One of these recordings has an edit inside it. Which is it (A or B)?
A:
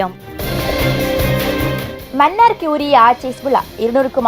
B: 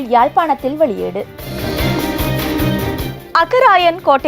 B